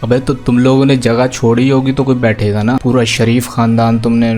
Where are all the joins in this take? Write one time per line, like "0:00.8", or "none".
0:02.8